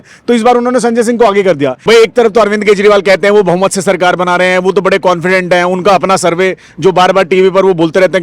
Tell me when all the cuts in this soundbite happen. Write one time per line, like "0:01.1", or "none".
0:01.8